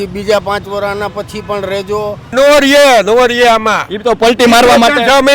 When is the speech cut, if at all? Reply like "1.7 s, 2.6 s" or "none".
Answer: 2.3 s